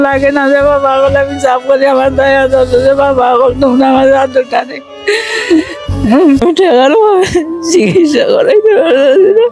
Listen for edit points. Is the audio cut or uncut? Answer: cut